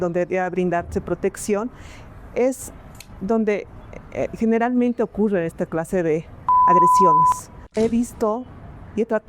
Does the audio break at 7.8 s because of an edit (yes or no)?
yes